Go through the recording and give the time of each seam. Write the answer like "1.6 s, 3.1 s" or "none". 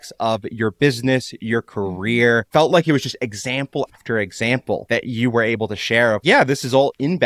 4.8 s